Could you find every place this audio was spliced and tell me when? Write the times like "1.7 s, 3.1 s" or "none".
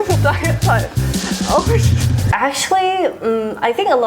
2.2 s